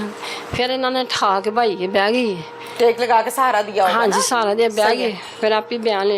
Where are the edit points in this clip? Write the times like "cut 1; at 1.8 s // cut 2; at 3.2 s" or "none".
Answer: none